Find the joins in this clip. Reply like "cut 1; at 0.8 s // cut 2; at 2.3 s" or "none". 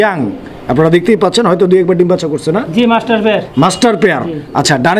none